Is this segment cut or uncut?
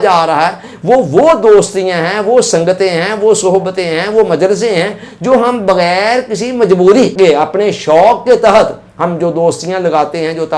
cut